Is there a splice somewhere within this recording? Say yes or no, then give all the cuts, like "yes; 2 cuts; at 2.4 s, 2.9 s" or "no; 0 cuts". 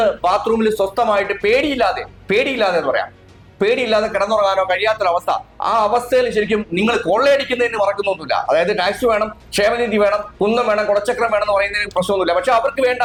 no; 0 cuts